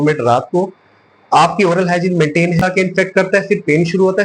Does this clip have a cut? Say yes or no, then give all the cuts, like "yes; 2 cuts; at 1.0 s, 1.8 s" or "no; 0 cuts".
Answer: yes; 1 cut; at 2.6 s